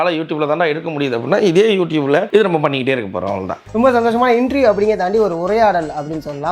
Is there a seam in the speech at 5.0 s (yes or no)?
no